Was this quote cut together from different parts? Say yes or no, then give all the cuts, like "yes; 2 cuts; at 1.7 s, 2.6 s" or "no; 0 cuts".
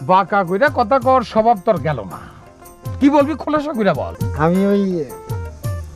yes; 1 cut; at 4.2 s